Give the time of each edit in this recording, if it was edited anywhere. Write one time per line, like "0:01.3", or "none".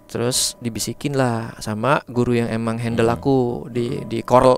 none